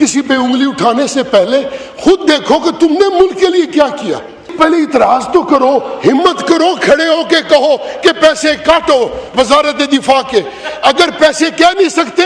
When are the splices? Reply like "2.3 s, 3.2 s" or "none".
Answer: 4.5 s